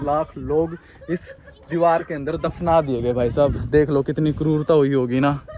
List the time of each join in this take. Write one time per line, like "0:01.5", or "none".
none